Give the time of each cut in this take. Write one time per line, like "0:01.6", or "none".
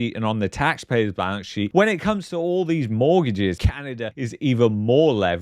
0:03.6